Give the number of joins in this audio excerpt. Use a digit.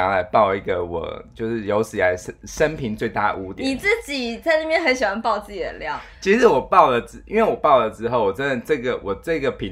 0